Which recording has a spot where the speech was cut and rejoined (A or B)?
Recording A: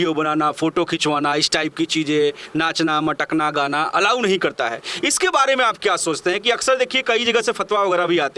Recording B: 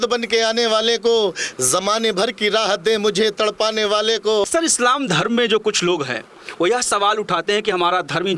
B